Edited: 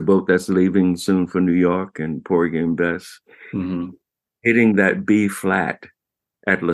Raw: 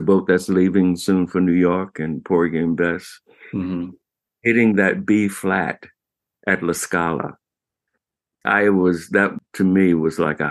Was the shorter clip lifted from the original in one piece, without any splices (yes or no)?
yes